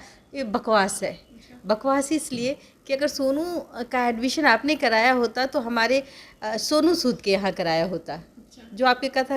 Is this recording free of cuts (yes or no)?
yes